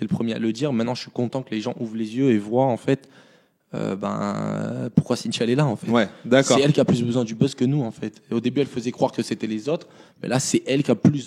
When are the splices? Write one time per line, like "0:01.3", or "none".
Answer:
none